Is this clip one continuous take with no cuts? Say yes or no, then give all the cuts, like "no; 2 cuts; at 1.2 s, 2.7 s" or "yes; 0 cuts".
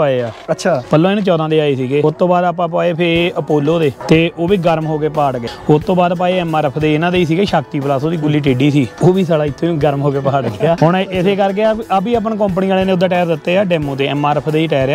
no; 6 cuts; at 0.8 s, 2.0 s, 4.0 s, 5.5 s, 8.9 s, 10.8 s